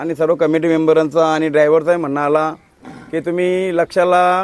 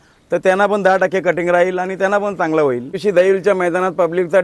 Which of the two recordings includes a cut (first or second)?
second